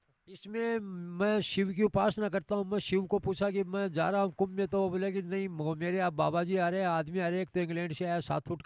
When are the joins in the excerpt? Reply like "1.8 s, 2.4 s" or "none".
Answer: none